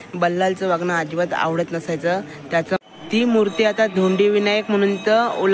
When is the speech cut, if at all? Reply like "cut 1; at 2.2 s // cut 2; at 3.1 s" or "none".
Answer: cut 1; at 2.8 s